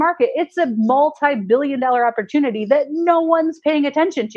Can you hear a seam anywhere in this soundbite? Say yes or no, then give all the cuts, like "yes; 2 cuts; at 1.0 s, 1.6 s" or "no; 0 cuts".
no; 0 cuts